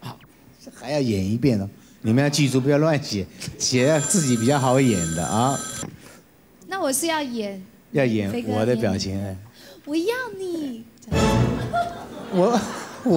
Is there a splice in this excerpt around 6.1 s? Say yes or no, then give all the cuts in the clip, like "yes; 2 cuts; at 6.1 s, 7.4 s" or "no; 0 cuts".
yes; 1 cut; at 6.1 s